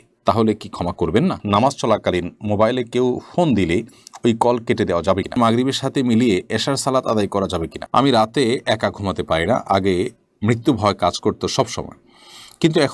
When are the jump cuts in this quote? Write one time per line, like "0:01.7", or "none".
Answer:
0:01.4
0:05.4
0:07.8